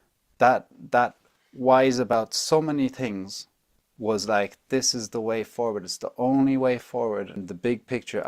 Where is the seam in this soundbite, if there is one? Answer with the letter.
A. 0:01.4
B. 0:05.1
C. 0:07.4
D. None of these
C